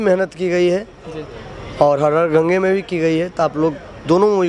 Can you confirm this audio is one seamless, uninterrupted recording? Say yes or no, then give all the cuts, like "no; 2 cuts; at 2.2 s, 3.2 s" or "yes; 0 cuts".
yes; 0 cuts